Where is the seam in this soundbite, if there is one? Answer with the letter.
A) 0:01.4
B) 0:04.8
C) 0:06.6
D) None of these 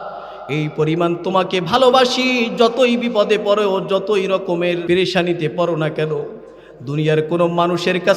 B